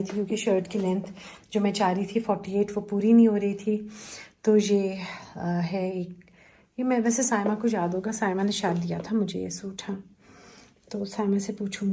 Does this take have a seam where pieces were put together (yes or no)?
no